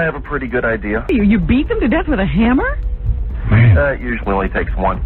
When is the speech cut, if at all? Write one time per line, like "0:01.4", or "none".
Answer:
0:01.1